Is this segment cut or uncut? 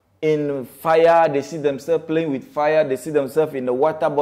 uncut